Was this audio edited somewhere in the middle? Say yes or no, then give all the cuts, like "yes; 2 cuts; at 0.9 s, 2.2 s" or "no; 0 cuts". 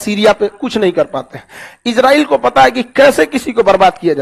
no; 0 cuts